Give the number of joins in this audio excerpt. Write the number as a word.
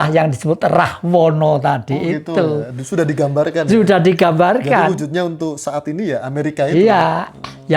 zero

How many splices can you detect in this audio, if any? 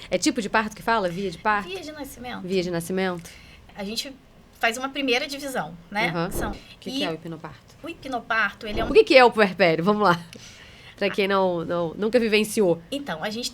three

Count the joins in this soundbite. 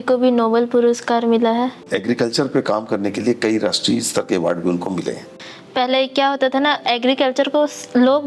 two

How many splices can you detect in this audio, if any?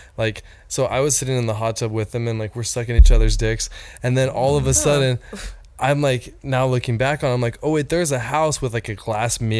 zero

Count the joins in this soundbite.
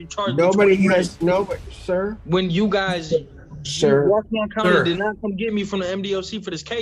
one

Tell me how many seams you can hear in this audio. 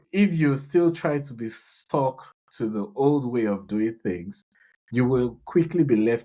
zero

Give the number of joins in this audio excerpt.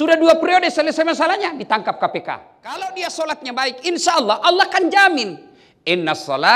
one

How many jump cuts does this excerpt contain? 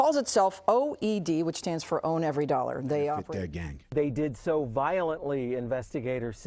one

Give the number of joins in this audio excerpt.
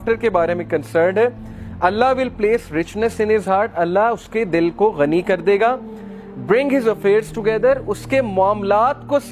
zero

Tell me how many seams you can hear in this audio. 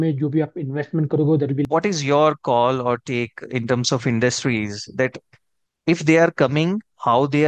one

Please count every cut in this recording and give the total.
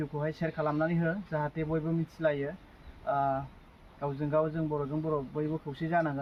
zero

